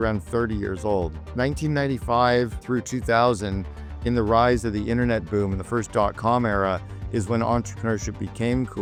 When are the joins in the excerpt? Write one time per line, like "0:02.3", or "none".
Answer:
none